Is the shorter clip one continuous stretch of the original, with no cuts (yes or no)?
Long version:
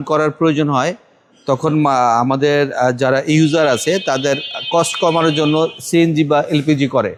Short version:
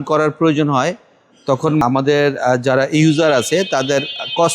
no